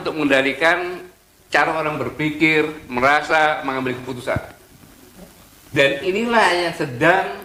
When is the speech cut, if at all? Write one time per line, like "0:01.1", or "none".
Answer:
none